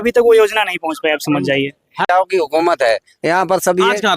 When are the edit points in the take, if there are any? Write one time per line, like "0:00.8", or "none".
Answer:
0:02.1